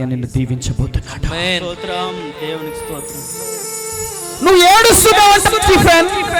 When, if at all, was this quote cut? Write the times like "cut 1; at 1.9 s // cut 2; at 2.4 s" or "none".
none

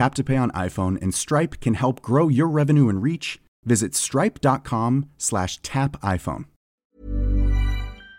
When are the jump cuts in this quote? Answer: cut 1; at 6.7 s

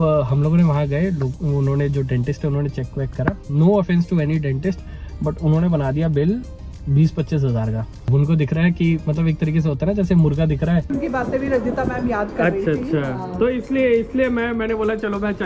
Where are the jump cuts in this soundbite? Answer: cut 1; at 7.9 s // cut 2; at 10.9 s

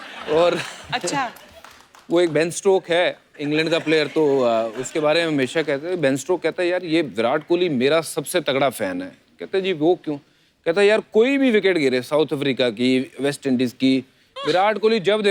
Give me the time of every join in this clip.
none

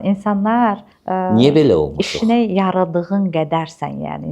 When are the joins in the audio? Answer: cut 1; at 0.9 s

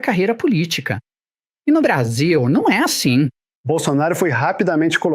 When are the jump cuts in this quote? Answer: cut 1; at 3.5 s

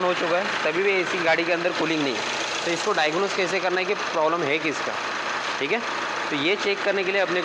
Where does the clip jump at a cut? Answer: none

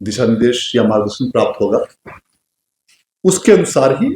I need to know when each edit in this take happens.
none

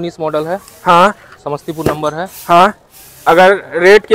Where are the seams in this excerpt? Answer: none

